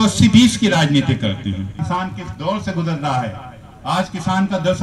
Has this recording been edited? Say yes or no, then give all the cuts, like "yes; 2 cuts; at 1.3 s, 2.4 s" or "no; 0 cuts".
yes; 1 cut; at 1.7 s